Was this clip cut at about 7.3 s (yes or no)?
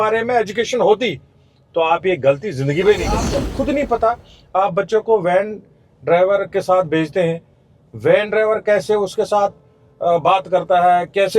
no